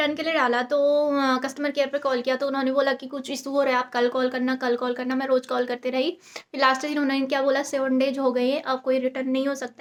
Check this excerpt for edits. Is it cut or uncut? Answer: uncut